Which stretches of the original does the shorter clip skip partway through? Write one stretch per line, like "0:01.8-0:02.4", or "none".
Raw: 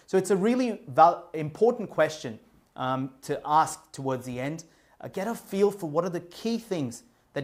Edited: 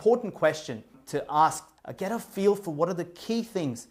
0:02.5-0:03.1
0:03.9-0:04.9